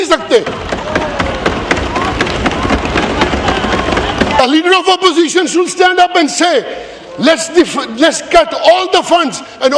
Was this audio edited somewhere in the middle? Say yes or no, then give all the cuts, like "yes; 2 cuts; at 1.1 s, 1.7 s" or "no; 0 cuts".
yes; 1 cut; at 4.4 s